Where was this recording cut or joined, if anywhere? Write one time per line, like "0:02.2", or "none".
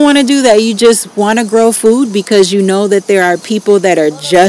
none